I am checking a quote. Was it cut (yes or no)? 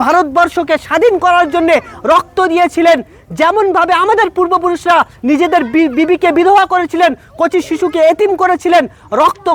no